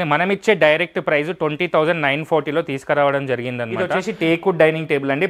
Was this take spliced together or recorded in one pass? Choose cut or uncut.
cut